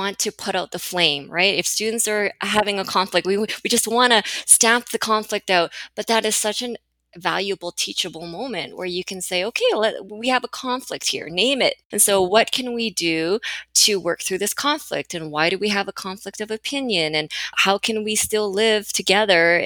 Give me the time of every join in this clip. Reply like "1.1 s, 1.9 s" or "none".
11.9 s